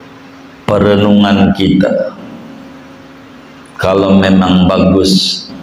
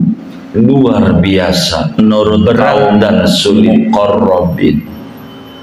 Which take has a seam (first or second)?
second